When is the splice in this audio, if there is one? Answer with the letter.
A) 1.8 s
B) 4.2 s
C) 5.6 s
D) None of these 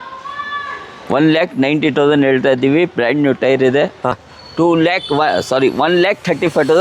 B